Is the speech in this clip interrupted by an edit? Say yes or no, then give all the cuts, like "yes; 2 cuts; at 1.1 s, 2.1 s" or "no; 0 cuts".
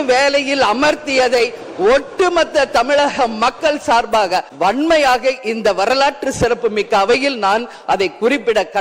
yes; 1 cut; at 4.5 s